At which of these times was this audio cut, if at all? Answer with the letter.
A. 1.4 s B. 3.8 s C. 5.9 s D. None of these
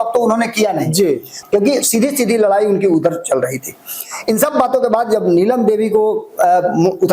A